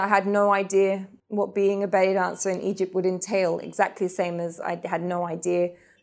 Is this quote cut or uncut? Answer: cut